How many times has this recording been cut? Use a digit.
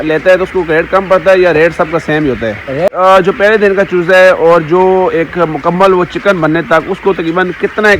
1